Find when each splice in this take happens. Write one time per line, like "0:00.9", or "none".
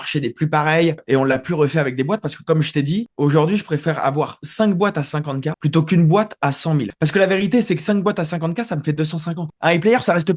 0:01.0
0:09.5